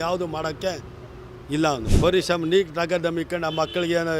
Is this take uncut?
no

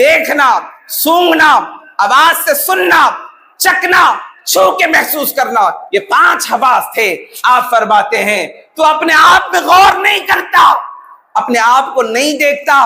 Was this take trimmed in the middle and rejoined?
no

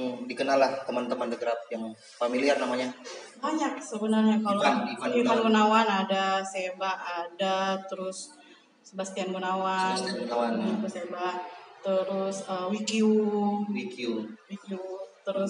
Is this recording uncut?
yes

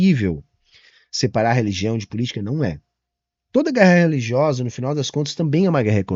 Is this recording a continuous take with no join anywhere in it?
yes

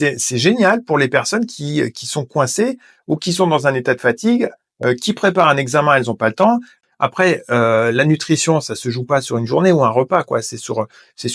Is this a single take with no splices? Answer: no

